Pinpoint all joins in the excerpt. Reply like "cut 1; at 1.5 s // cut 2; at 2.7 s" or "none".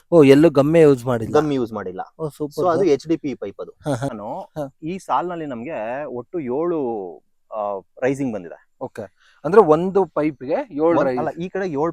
cut 1; at 4.2 s